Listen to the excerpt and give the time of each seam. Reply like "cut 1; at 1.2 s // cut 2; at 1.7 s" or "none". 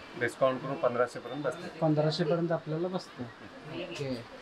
none